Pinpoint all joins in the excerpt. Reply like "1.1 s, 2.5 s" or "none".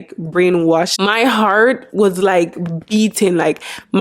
0.9 s